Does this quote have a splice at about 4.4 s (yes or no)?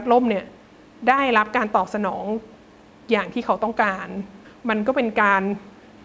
yes